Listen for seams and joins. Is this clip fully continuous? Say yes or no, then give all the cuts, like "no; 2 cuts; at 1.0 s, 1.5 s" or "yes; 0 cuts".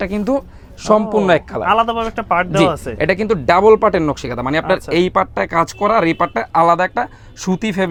yes; 0 cuts